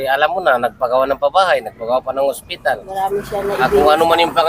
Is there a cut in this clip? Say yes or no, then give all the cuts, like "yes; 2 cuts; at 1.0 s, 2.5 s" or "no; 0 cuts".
no; 0 cuts